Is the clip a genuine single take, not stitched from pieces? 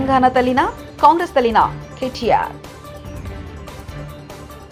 yes; 0 cuts

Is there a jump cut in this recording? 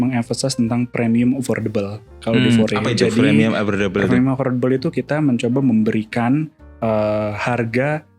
no; 0 cuts

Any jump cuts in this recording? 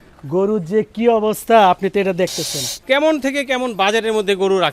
yes; 1 cut; at 2.8 s

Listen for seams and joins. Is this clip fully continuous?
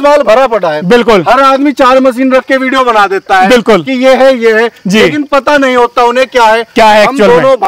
yes; 0 cuts

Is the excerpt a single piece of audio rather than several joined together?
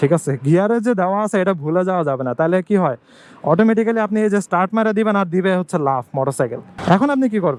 yes; 0 cuts

